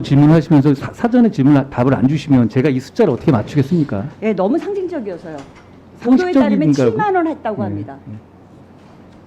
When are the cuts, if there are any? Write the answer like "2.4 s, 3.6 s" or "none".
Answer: none